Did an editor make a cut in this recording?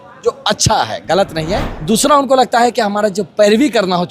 yes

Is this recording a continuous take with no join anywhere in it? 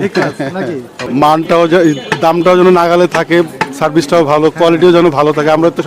no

